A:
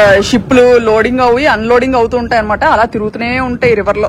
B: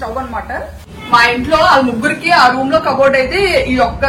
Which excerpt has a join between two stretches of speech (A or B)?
B